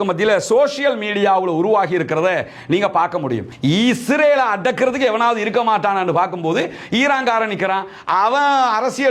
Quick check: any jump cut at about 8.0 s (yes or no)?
no